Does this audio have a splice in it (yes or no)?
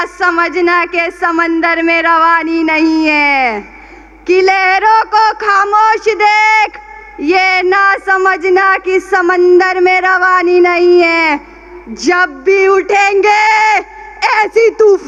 no